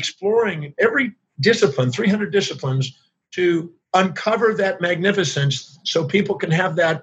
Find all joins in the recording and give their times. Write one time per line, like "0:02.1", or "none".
0:01.2
0:03.8